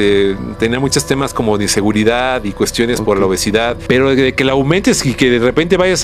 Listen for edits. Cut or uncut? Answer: cut